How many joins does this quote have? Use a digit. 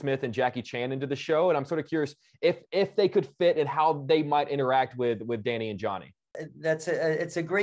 1